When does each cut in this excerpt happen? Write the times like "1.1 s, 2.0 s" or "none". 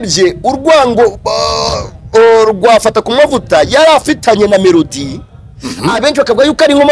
none